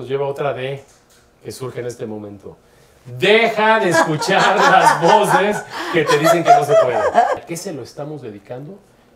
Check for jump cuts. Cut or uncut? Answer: cut